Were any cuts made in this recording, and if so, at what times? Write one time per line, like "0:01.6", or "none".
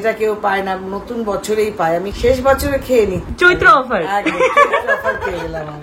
0:02.1